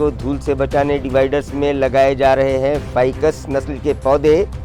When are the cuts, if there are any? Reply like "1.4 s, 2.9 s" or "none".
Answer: none